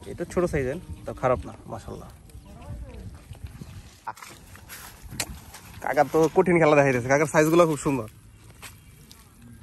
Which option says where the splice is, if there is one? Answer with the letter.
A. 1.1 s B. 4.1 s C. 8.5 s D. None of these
B